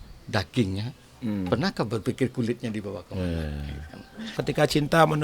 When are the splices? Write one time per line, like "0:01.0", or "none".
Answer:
0:04.3